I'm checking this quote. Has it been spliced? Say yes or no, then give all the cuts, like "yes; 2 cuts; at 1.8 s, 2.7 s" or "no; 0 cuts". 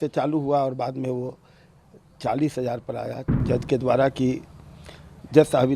yes; 1 cut; at 3.3 s